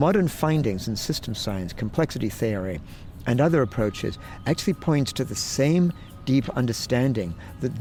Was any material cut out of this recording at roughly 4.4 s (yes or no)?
no